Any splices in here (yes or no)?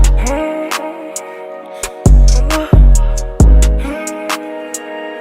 no